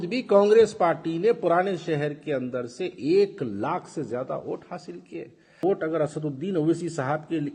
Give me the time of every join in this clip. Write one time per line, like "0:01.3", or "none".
0:05.6

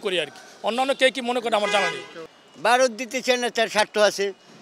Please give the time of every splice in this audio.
0:02.2

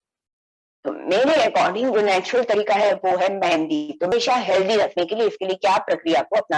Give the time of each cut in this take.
0:04.1

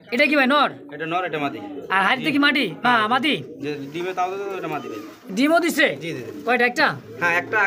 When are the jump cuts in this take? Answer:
none

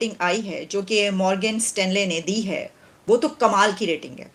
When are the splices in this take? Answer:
none

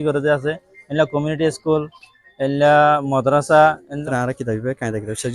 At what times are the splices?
0:04.0

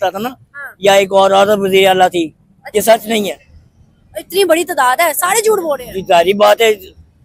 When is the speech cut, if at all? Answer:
0:02.5

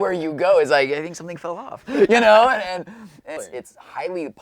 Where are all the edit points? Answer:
0:03.4

